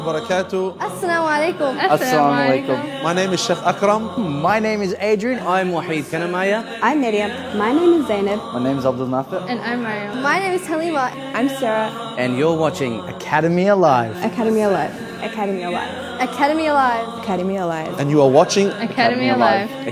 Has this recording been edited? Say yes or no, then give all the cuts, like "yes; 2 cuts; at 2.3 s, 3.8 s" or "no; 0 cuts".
no; 0 cuts